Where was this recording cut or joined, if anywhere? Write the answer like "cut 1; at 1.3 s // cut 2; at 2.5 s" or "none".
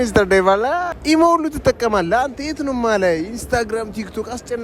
cut 1; at 0.9 s